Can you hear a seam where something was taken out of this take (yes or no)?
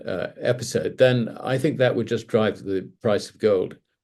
no